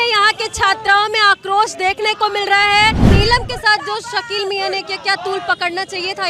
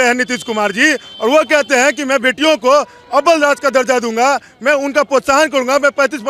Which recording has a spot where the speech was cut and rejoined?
first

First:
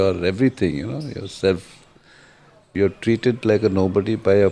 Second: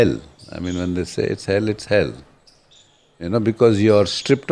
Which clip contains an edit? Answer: first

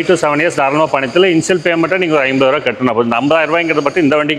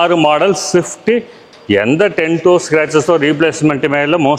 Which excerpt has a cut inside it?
second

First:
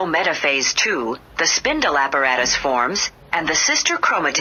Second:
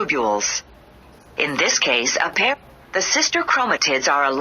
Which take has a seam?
second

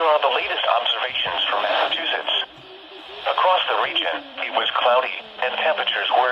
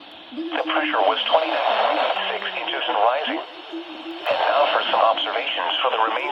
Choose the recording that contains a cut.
first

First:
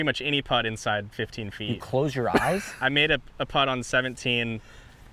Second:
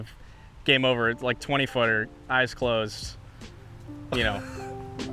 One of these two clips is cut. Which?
first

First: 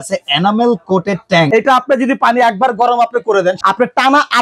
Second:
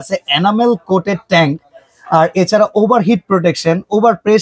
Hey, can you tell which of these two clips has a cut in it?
first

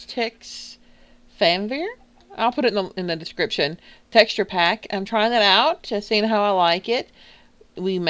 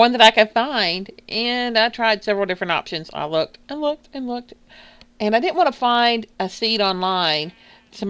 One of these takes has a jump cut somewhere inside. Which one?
first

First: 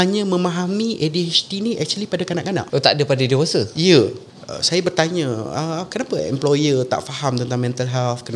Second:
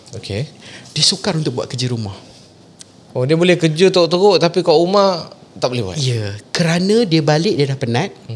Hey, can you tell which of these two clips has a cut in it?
first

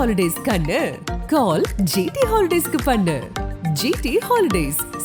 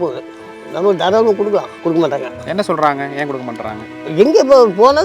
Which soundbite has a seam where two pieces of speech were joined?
second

